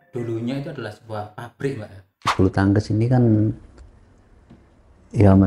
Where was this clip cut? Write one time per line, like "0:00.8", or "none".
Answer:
0:02.3